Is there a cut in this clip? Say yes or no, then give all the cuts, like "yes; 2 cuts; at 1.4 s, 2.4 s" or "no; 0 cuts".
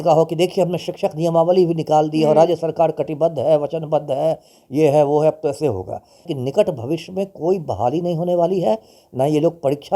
yes; 1 cut; at 6.3 s